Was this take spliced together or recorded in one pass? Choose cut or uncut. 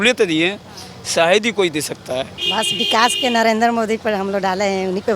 cut